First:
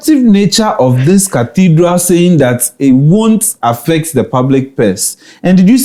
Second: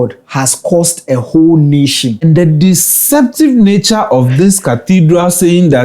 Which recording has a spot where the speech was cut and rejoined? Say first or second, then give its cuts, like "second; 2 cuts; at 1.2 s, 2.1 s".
second; 1 cut; at 2.2 s